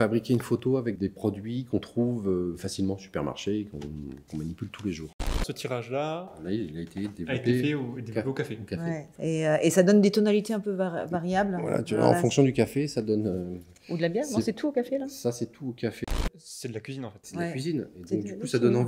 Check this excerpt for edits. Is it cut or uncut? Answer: cut